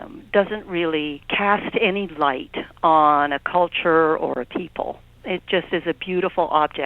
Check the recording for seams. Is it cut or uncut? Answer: cut